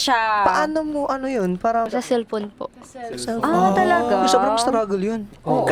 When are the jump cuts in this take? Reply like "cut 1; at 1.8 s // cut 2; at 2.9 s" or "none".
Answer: cut 1; at 1.9 s